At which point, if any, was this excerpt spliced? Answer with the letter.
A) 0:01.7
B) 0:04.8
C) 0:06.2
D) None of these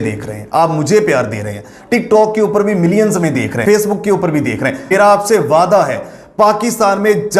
B